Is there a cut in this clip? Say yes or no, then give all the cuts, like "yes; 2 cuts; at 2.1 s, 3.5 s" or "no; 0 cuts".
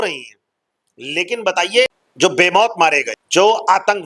yes; 2 cuts; at 2.0 s, 3.1 s